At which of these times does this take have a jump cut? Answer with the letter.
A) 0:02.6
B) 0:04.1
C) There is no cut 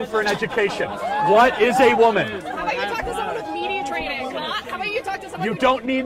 C